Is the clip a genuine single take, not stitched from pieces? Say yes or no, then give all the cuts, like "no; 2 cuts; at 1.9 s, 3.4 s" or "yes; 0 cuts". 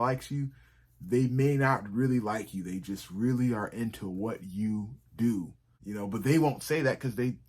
no; 1 cut; at 5.6 s